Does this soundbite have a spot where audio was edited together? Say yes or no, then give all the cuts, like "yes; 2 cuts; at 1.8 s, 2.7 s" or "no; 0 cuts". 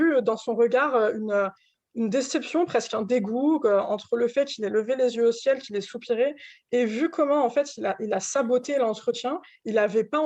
no; 0 cuts